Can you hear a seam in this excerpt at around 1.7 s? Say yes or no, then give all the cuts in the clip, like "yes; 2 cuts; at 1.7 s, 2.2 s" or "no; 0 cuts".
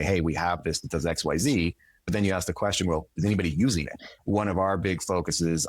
no; 1 cut; at 4.1 s